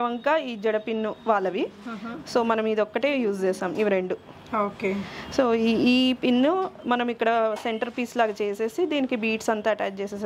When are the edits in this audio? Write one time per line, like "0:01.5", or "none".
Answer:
none

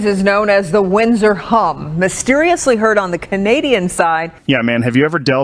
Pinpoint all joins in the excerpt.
0:04.3

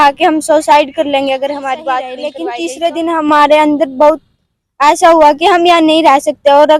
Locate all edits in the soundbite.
0:02.4

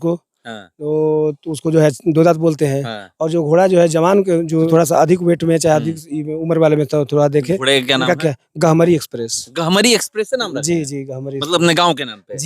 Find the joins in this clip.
0:04.7

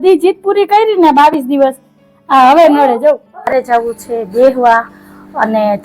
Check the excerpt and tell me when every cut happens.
0:03.4

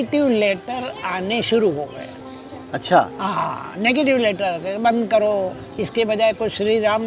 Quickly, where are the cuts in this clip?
none

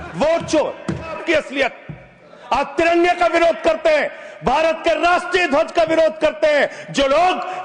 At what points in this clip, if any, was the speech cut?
0:01.2

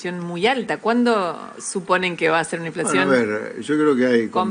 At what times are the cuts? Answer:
none

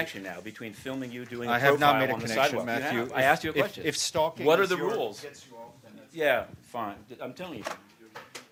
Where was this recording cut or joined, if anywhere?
none

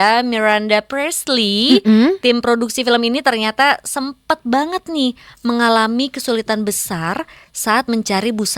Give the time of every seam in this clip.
none

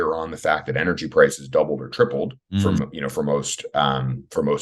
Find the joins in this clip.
0:02.4

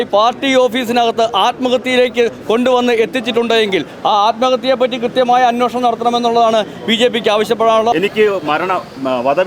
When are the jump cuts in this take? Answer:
0:07.9

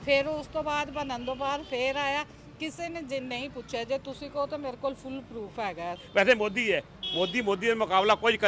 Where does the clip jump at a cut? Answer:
0:06.0

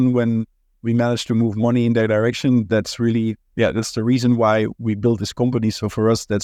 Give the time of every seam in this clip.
none

